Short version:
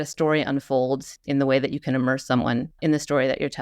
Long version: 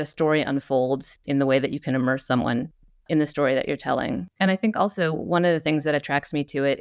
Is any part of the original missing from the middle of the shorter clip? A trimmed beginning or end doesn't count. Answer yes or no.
yes